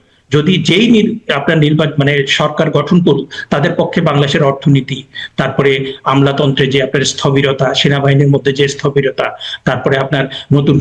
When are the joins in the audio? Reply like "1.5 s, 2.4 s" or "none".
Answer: none